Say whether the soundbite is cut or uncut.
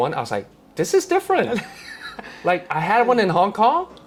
uncut